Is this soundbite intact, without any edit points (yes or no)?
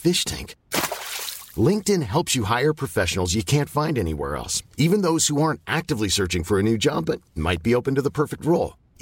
yes